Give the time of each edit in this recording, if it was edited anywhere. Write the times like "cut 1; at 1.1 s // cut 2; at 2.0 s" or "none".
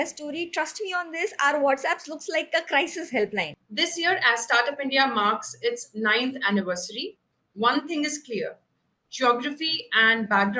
cut 1; at 3.6 s

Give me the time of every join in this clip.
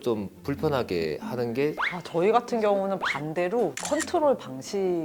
cut 1; at 1.8 s // cut 2; at 3.9 s

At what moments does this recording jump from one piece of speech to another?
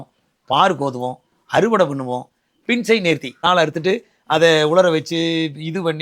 cut 1; at 3.4 s

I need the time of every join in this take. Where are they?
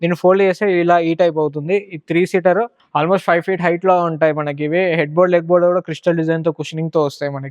cut 1; at 2.8 s

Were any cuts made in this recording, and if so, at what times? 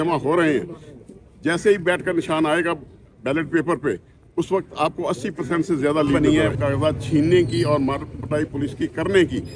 cut 1; at 6.2 s

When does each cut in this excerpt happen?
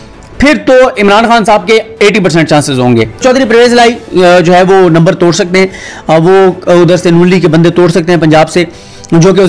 cut 1; at 3.2 s

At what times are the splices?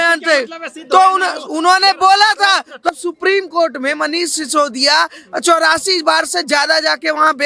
cut 1; at 2.9 s

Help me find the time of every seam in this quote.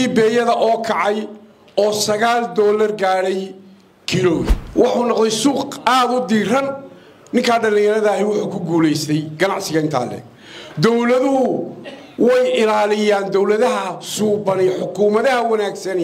cut 1; at 4.6 s

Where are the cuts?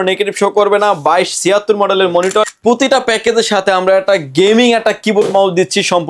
cut 1; at 2.5 s

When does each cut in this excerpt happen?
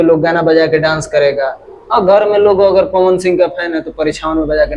none

